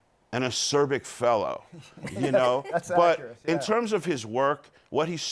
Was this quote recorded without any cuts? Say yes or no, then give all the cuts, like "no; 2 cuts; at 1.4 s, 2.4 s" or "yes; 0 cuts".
yes; 0 cuts